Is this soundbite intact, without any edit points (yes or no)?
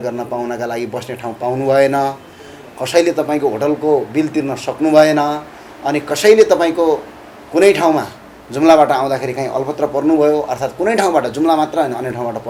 yes